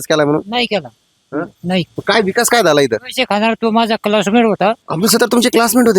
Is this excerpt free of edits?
no; 2 cuts; at 1.9 s, 4.9 s

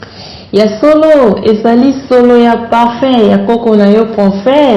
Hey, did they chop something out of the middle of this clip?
no; 0 cuts

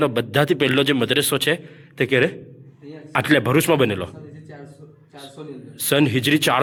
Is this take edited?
no; 0 cuts

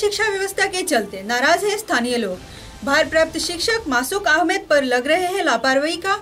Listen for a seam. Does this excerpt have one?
no; 0 cuts

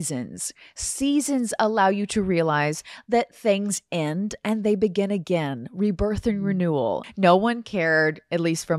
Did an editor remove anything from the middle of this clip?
yes; 1 cut; at 7.1 s

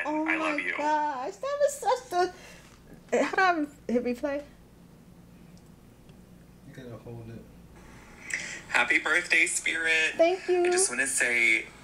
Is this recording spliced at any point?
no; 0 cuts

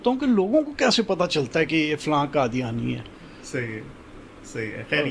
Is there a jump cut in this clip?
no; 0 cuts

